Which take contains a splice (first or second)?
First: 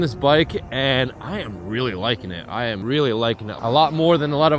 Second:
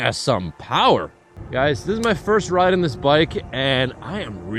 first